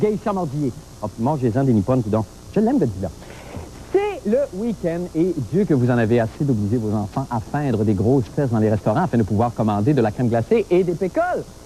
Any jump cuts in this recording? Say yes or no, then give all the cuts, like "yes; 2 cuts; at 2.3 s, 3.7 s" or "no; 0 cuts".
yes; 1 cut; at 10.5 s